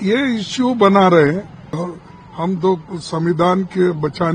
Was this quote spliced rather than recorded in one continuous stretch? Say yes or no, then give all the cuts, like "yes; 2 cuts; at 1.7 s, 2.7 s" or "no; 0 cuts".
yes; 1 cut; at 1.8 s